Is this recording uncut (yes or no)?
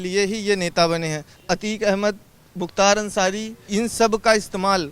no